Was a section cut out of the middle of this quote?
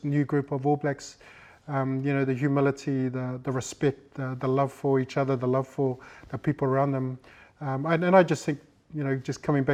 no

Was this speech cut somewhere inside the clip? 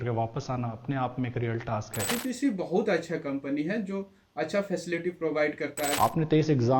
yes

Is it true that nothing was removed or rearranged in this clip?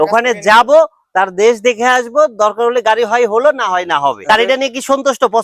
no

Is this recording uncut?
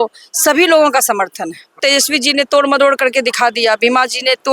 no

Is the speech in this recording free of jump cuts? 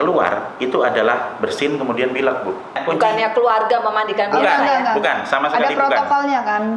no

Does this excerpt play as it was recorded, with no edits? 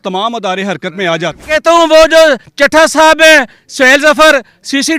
no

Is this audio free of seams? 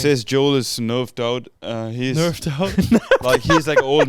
yes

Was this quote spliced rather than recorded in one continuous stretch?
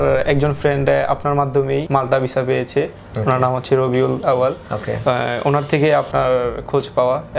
no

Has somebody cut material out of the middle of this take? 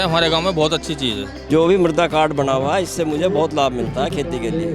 yes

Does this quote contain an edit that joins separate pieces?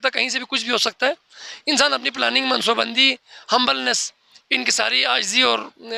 no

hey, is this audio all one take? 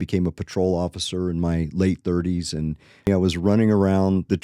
no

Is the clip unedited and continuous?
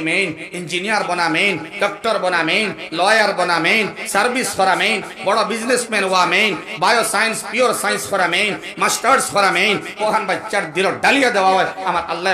yes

